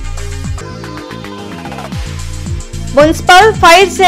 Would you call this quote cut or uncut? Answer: cut